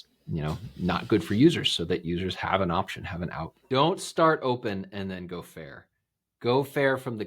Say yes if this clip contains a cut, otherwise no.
yes